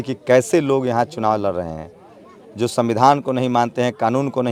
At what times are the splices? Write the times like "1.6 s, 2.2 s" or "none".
none